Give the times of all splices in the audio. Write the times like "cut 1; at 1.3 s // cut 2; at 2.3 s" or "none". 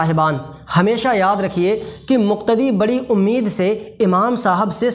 none